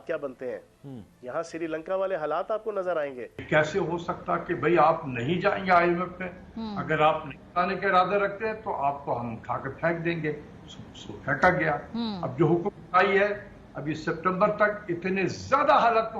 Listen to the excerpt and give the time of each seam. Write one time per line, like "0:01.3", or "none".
0:03.4